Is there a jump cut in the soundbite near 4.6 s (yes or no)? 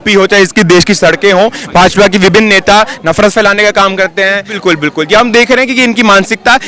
yes